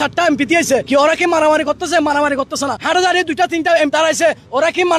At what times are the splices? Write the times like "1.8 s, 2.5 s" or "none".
0.8 s, 2.8 s, 3.9 s